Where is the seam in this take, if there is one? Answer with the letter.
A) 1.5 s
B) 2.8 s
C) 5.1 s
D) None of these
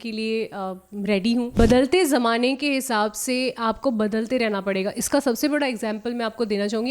A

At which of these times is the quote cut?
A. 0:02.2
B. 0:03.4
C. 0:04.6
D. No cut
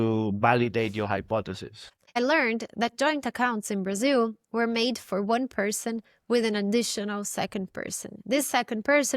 A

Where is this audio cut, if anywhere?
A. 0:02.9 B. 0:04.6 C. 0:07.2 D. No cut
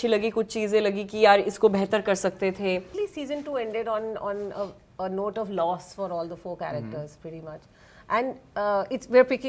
A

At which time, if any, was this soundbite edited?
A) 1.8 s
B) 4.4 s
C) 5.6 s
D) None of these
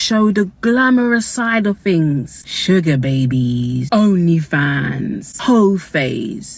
D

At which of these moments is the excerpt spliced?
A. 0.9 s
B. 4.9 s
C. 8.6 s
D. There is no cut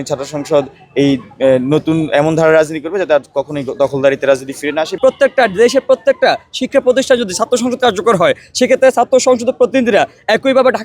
B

